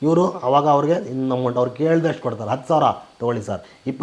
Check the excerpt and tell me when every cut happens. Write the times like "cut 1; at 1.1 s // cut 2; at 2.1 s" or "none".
none